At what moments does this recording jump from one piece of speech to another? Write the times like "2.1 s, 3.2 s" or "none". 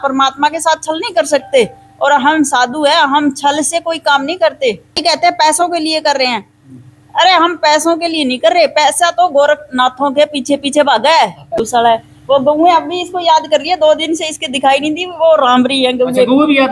5.0 s, 11.6 s